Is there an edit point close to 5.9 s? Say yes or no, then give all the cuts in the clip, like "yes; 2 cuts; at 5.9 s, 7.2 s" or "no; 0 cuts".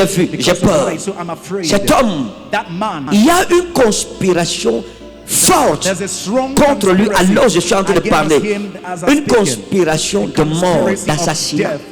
no; 1 cut; at 3.0 s